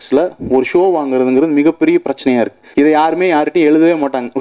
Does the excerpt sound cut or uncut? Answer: cut